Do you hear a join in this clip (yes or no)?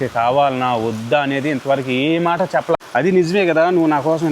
yes